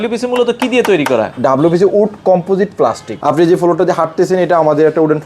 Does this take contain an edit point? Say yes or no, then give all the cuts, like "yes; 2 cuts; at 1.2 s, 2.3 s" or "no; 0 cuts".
yes; 1 cut; at 3.1 s